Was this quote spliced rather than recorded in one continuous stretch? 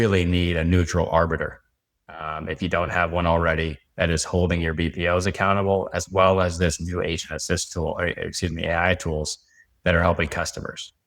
no; 0 cuts

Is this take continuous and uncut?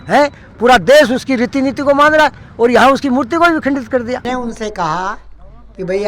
no; 1 cut; at 4.2 s

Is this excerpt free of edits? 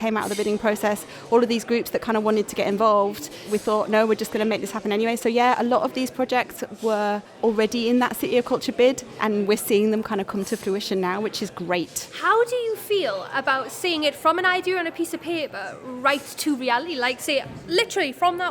yes; 0 cuts

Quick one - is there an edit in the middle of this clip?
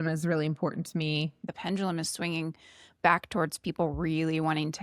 yes; 1 cut; at 1.4 s

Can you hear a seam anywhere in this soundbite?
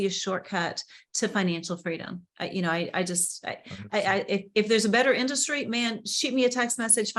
no; 0 cuts

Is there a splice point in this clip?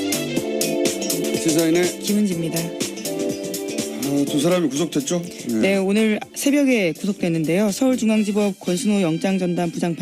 yes; 1 cut; at 1.3 s

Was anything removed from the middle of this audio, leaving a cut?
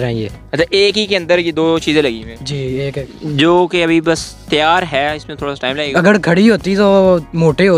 yes; 2 cuts; at 3.2 s, 5.9 s

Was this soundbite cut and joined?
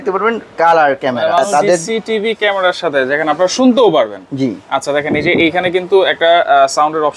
yes; 1 cut; at 1.5 s

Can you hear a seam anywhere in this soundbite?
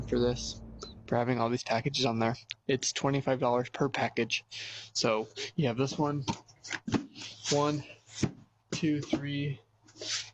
yes; 1 cut; at 9.1 s

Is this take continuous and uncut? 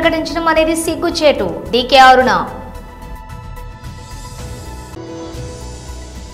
yes; 0 cuts

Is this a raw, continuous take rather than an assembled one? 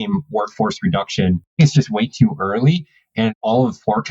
no; 2 cuts; at 1.5 s, 3.2 s

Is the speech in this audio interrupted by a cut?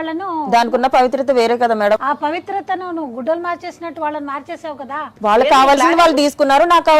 yes; 2 cuts; at 2.0 s, 5.1 s

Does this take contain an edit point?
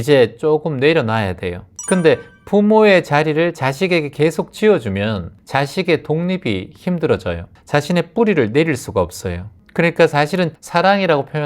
yes; 2 cuts; at 5.3 s, 7.5 s

